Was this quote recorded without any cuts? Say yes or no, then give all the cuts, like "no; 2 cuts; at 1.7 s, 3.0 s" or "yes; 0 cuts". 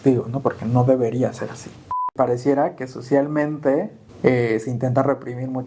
no; 2 cuts; at 2.0 s, 4.0 s